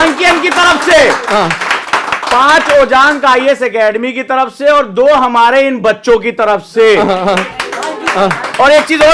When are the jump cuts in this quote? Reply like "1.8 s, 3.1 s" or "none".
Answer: none